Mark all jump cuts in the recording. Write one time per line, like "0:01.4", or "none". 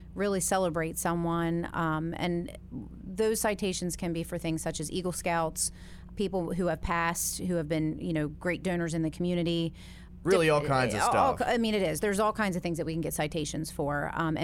none